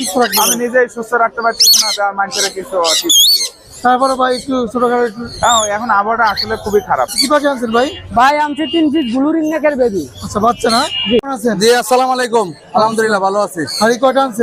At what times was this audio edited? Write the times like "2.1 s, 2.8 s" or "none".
7.1 s, 11.3 s